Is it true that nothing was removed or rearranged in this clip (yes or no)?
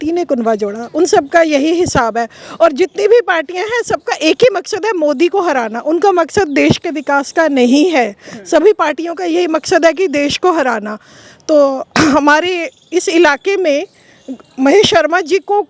yes